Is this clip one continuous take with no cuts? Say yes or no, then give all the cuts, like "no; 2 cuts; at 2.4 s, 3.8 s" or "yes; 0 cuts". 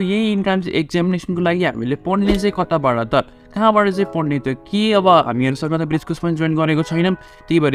yes; 0 cuts